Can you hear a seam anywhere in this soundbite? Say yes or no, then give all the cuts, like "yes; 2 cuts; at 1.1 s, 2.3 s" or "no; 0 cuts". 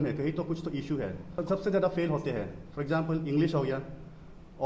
yes; 1 cut; at 1.4 s